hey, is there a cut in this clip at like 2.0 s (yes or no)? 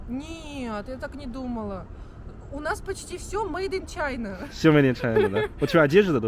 no